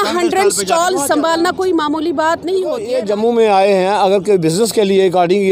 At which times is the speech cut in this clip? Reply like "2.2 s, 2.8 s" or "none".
2.9 s